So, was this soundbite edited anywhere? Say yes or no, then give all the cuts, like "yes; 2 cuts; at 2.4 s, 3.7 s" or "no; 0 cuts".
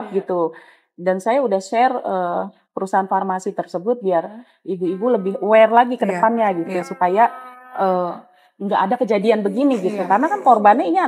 no; 0 cuts